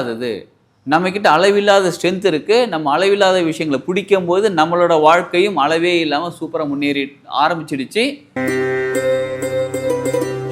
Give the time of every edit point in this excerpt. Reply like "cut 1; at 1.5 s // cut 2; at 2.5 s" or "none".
cut 1; at 8.2 s